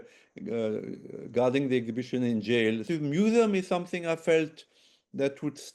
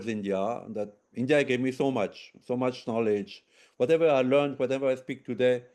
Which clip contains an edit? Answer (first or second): first